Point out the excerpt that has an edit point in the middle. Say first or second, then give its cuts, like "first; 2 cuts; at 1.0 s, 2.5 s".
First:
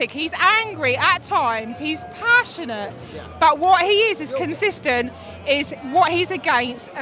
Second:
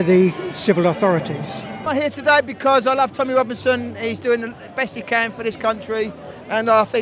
second; 1 cut; at 1.8 s